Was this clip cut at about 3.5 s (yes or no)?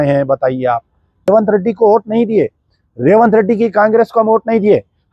no